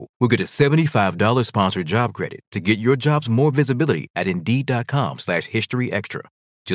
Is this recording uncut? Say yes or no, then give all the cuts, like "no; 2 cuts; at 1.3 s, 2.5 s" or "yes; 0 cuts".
yes; 0 cuts